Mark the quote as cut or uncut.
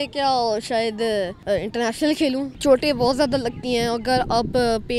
cut